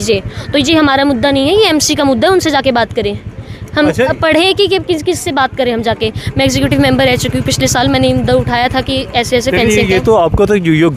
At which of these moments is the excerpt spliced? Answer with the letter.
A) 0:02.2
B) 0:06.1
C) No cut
C